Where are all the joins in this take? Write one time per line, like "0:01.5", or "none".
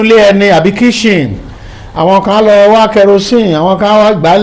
none